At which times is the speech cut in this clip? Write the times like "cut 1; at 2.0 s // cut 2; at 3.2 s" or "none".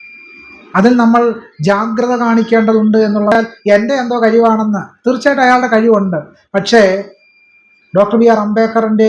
cut 1; at 3.3 s